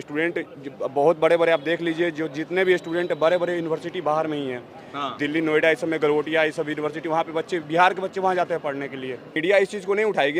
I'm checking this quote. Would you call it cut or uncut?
cut